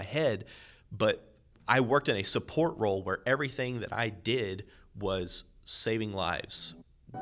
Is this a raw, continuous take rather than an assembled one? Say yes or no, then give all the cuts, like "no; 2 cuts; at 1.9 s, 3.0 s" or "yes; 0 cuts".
yes; 0 cuts